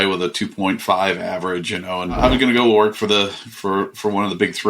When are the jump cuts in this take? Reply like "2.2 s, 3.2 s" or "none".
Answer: 2.2 s